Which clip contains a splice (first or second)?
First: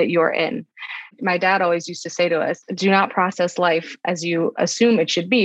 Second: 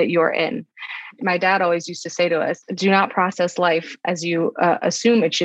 first